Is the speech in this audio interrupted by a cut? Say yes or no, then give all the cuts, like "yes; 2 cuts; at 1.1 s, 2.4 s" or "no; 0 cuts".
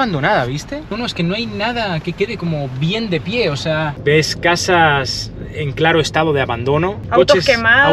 yes; 3 cuts; at 0.9 s, 3.9 s, 7.0 s